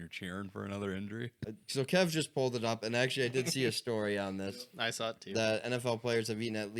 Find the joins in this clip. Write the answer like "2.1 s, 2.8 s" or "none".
1.4 s